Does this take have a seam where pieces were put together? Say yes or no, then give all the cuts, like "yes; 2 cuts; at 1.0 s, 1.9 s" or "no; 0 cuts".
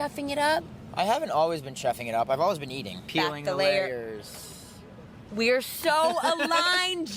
yes; 1 cut; at 3.1 s